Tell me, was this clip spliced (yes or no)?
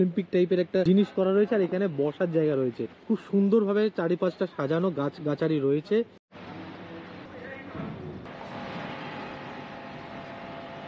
no